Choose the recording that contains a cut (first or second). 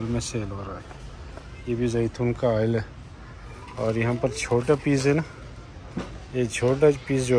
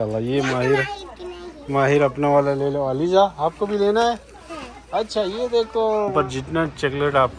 second